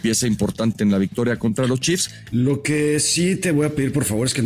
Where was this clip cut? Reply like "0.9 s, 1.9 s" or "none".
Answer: 2.1 s